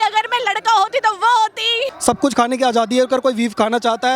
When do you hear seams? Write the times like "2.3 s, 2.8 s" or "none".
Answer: 1.9 s